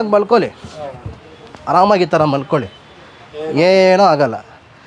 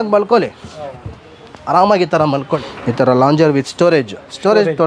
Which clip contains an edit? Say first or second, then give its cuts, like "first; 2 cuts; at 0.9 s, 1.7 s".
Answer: second; 1 cut; at 2.7 s